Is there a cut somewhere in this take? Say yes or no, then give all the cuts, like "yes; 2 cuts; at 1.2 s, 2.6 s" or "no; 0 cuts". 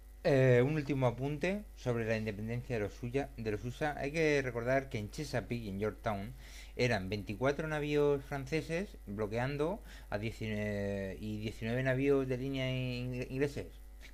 no; 0 cuts